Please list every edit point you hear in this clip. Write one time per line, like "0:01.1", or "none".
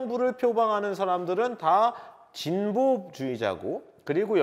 none